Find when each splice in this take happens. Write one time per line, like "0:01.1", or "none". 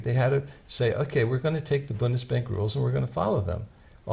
0:01.5